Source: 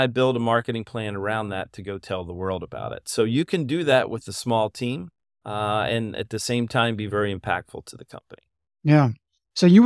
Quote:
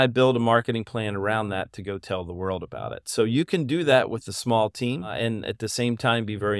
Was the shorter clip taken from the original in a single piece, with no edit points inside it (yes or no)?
no